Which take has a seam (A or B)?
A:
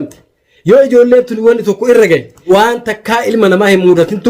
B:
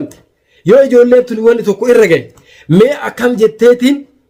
A